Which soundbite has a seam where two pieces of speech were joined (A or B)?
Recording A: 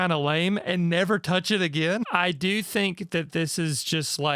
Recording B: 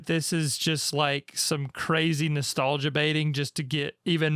A